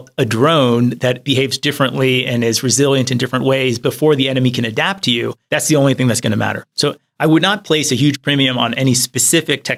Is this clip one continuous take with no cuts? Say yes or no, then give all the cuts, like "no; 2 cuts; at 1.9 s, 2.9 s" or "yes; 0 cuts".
yes; 0 cuts